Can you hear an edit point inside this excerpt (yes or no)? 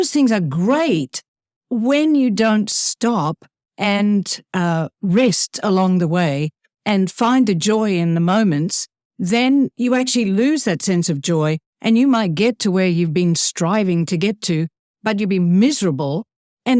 no